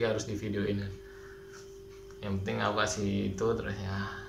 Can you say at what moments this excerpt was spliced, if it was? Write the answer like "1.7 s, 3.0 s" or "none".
none